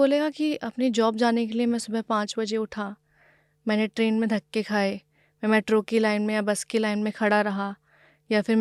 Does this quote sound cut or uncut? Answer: uncut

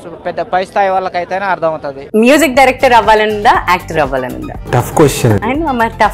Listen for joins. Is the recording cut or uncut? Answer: cut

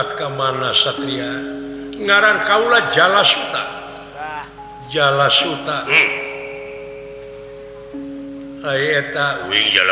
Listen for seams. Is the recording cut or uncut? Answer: uncut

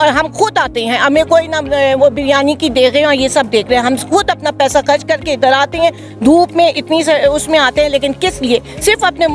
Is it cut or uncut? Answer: uncut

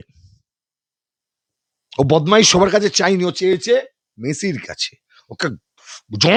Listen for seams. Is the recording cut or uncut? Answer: uncut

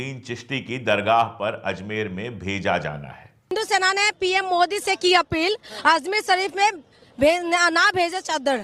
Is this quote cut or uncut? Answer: cut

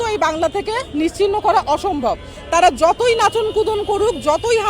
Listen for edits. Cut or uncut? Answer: uncut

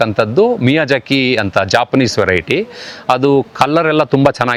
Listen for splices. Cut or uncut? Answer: uncut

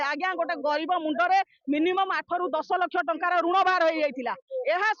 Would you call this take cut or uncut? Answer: uncut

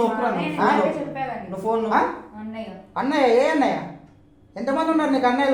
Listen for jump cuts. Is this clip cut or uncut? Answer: uncut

